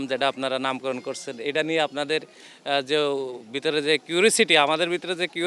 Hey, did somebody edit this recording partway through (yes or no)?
no